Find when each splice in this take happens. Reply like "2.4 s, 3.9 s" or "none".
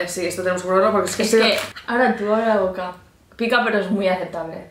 1.7 s